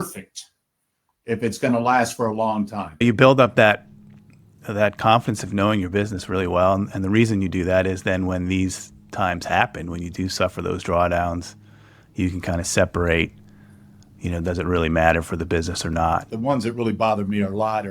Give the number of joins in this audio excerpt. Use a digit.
2